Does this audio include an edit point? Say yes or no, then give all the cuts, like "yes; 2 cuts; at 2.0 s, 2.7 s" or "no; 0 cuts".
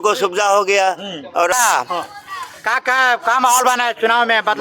yes; 1 cut; at 1.5 s